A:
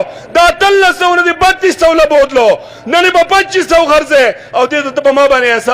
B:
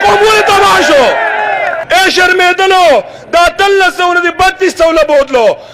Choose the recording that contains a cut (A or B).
B